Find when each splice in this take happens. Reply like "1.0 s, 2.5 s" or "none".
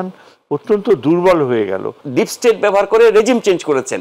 2.0 s